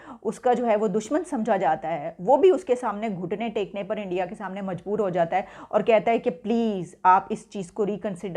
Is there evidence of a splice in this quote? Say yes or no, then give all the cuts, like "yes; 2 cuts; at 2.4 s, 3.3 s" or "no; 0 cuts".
no; 0 cuts